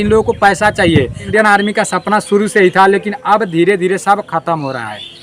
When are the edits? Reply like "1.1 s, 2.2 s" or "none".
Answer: 1.3 s

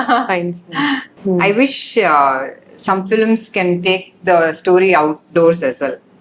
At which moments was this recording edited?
1.1 s

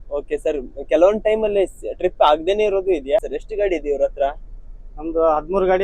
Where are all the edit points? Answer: 3.3 s

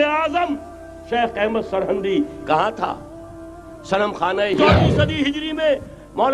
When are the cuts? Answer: 4.6 s

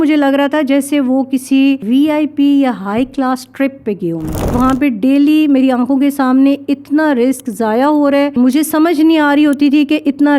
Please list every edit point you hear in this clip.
1.8 s, 4.5 s, 8.3 s

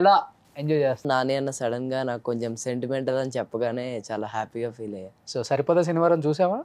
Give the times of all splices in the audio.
1.1 s

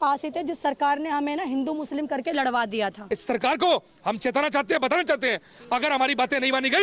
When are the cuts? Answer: 3.1 s

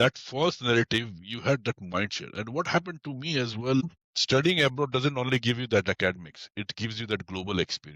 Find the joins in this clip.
3.8 s

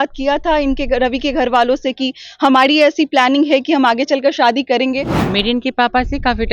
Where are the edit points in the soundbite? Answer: 5.2 s

